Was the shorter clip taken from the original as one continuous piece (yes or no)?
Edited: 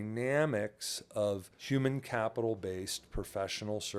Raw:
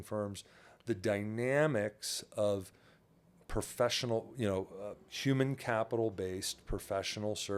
no